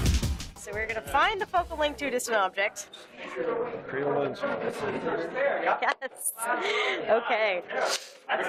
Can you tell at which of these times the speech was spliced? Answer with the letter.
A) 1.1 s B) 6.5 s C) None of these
C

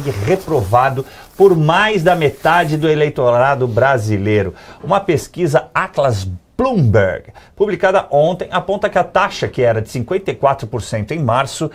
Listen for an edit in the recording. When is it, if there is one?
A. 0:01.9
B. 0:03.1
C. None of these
C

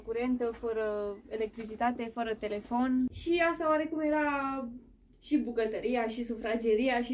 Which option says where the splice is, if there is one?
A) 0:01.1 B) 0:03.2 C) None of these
B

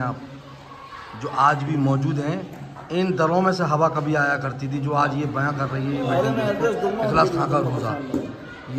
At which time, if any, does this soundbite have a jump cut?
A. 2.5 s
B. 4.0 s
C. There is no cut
C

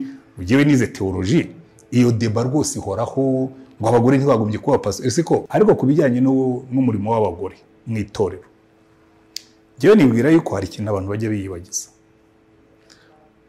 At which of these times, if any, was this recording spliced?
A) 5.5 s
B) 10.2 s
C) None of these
A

